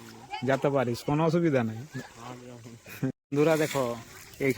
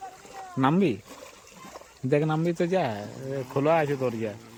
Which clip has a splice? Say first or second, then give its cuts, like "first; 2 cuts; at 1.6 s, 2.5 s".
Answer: first; 1 cut; at 3.1 s